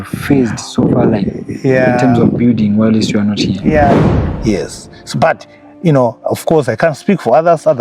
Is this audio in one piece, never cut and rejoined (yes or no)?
no